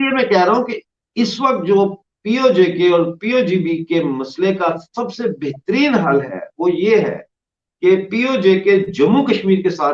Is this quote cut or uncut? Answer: uncut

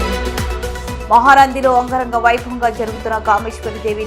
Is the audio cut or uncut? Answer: uncut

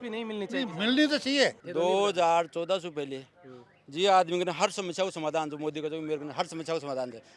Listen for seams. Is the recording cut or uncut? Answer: cut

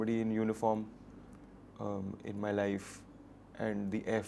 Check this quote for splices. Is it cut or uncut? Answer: uncut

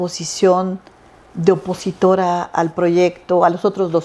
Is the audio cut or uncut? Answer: uncut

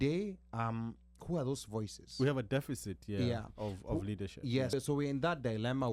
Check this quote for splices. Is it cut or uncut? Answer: cut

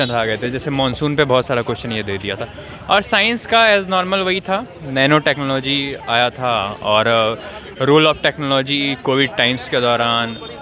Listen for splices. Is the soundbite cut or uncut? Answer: uncut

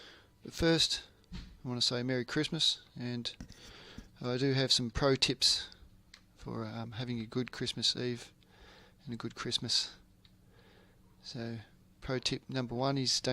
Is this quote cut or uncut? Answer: cut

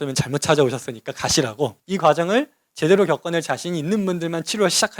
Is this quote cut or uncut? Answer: cut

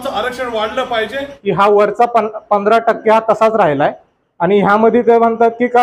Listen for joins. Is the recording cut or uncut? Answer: cut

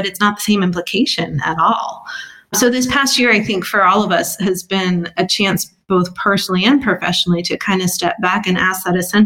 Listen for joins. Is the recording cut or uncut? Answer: cut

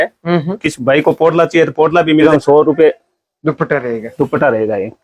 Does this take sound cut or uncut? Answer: cut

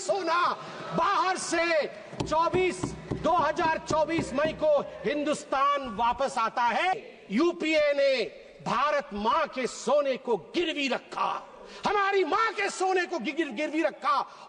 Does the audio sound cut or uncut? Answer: cut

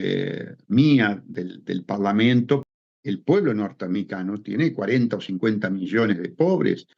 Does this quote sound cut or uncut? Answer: cut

